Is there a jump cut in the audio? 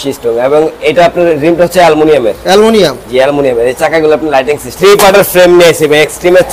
yes; 1 cut; at 4.7 s

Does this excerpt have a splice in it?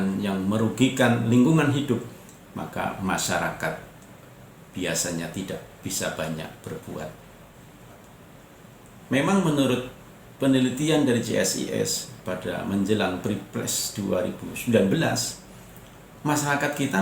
yes; 1 cut; at 7.6 s

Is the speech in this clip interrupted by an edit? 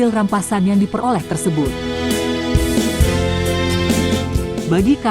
no; 0 cuts

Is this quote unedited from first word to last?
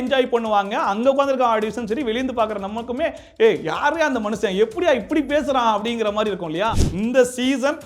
no; 1 cut; at 6.8 s

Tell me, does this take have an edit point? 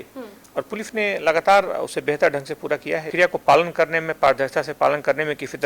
yes; 1 cut; at 3.1 s

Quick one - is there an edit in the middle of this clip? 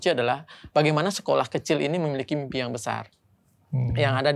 no; 0 cuts

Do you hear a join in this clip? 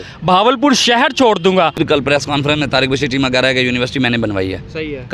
yes; 1 cut; at 1.8 s

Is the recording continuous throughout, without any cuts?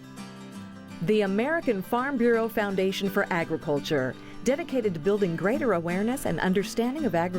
no; 1 cut; at 1.0 s

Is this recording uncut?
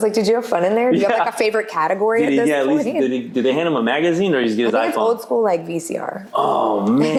yes; 0 cuts

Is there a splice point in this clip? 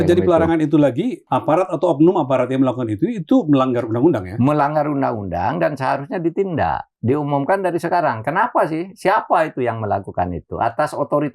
yes; 1 cut; at 1.2 s

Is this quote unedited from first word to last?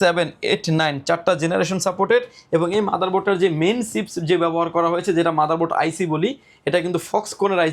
yes; 0 cuts

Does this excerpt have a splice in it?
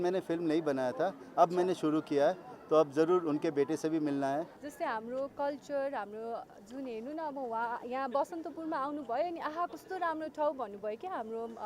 yes; 1 cut; at 4.5 s

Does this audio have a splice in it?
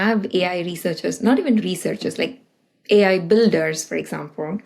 no; 0 cuts

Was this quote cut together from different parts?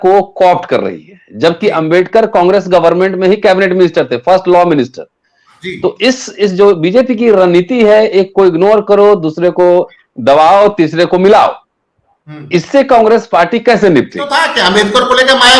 yes; 1 cut; at 14.4 s

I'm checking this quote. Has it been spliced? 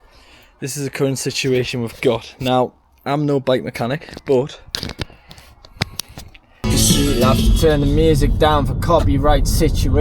yes; 1 cut; at 6.4 s

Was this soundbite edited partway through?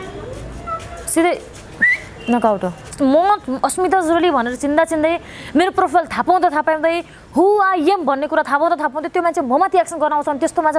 yes; 1 cut; at 2.9 s

